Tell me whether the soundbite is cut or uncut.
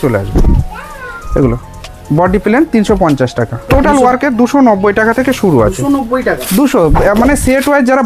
cut